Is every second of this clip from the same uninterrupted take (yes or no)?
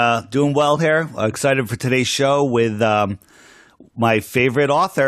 yes